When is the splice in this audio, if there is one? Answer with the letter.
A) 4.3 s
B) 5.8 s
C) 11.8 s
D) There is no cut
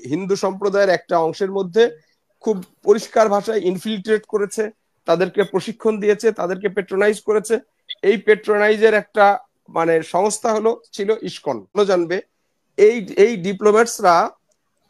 C